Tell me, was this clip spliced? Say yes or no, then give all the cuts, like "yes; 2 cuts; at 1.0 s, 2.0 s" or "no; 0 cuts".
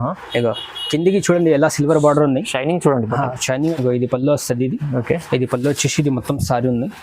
yes; 1 cut; at 3.7 s